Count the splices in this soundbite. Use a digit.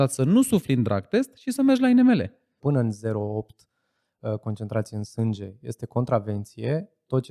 1